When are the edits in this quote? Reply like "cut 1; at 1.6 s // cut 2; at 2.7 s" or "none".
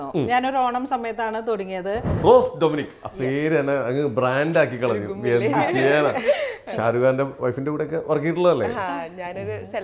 cut 1; at 2.1 s